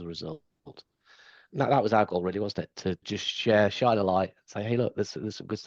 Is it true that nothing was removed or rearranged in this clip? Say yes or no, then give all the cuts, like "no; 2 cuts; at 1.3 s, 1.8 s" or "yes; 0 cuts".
no; 1 cut; at 3.1 s